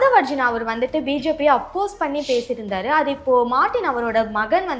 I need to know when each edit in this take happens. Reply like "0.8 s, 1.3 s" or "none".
none